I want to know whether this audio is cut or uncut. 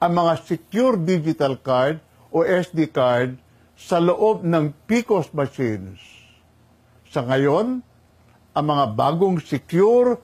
uncut